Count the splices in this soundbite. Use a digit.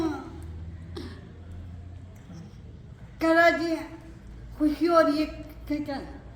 0